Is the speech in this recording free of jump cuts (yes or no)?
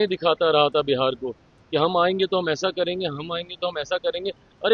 yes